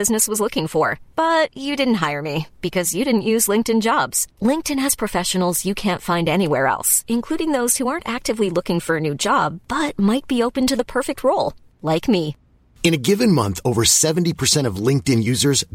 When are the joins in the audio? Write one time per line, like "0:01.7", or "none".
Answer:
none

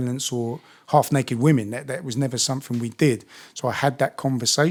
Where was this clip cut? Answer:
none

